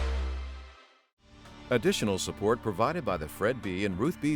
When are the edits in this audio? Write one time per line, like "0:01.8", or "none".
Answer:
0:01.6

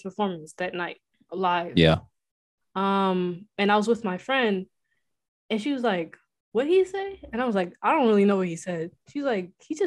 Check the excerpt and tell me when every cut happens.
none

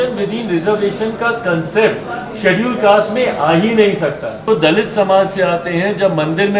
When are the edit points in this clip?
0:04.4

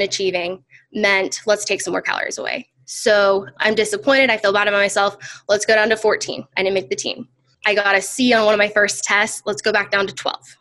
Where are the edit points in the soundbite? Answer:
0:03.5
0:07.5

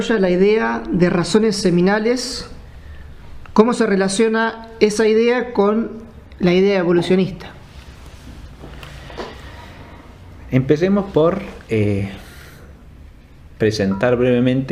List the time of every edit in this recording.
none

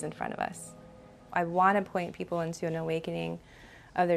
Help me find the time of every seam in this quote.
0:01.3

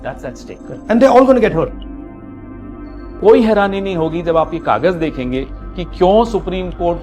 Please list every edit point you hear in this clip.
0:01.8
0:03.1

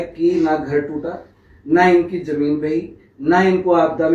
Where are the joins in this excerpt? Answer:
none

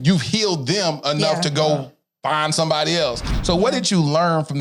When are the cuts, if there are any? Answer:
0:03.3

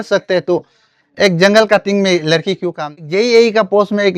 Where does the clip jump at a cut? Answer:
0:02.7

